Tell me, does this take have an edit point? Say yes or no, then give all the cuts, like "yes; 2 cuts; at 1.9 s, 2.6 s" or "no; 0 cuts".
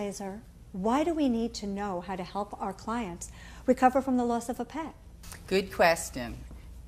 no; 0 cuts